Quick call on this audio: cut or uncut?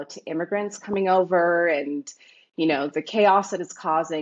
uncut